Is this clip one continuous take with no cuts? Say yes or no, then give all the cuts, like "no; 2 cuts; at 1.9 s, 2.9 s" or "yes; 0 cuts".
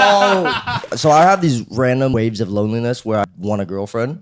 no; 3 cuts; at 0.9 s, 2.1 s, 3.2 s